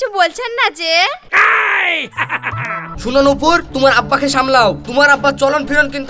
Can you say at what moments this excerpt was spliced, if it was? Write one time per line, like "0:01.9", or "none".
0:02.9

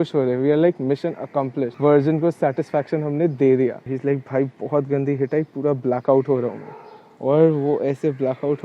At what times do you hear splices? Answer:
0:01.7
0:03.9

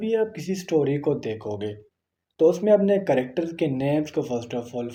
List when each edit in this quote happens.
none

